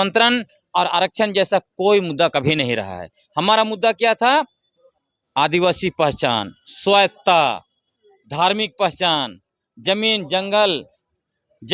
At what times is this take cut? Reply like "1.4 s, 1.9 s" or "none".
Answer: none